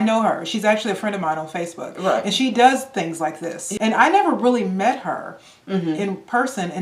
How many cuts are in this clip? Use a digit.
1